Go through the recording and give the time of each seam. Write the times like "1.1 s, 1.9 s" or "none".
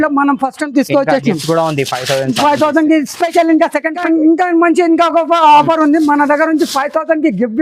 4.0 s